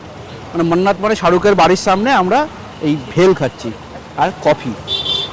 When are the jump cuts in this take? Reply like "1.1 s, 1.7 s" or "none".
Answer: none